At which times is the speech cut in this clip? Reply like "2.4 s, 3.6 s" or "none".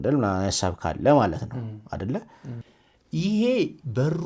2.7 s